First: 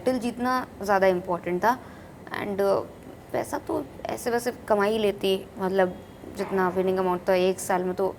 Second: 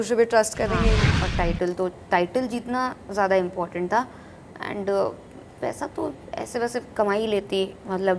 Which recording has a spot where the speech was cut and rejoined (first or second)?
second